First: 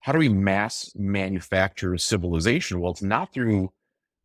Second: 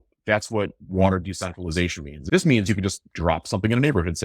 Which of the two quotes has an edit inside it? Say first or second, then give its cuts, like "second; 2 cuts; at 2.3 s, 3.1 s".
second; 1 cut; at 2.1 s